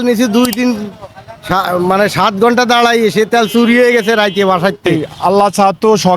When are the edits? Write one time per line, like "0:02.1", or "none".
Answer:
0:05.0